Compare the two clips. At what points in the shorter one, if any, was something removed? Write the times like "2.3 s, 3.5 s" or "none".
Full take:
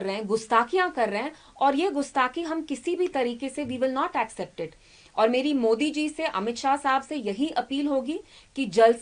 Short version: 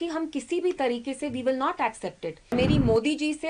2.5 s